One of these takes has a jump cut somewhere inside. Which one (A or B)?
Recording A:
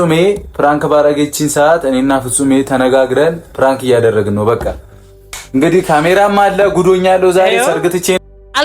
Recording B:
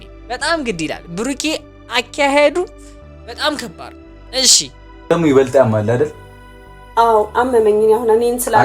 B